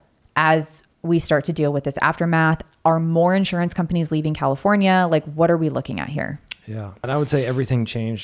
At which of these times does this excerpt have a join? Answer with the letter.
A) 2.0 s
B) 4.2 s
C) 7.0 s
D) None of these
C